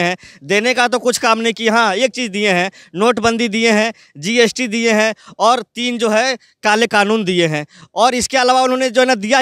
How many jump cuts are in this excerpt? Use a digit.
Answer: 0